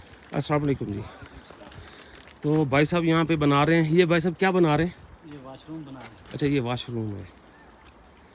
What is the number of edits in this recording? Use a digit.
0